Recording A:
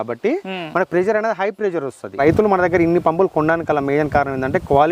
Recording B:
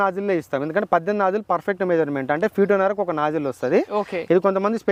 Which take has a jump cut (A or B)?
A